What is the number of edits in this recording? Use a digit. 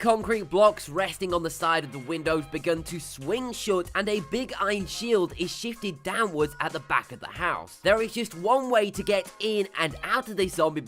1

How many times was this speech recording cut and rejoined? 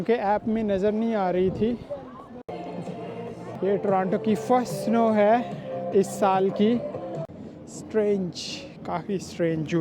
3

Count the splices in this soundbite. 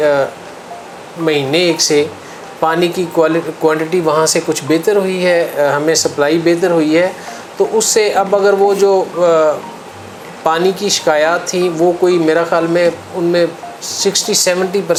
0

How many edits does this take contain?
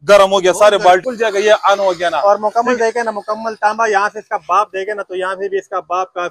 1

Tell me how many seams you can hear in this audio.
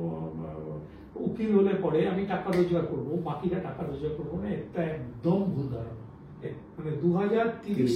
1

